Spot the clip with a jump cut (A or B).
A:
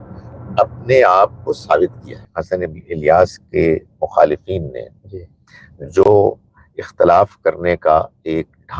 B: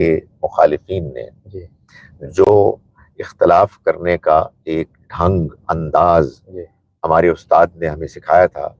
A